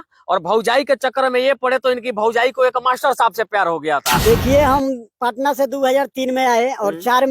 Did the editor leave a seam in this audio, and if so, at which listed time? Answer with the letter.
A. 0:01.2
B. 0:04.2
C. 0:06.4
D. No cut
B